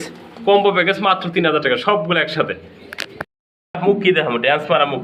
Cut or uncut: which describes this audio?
uncut